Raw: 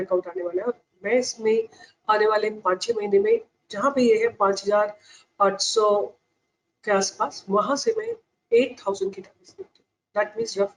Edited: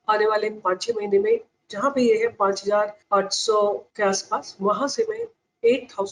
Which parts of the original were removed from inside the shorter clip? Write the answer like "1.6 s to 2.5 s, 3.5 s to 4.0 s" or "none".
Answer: 5.0 s to 5.3 s, 6.2 s to 6.8 s